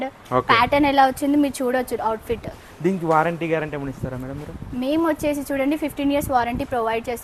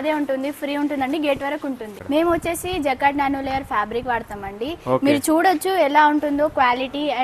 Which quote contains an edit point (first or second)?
second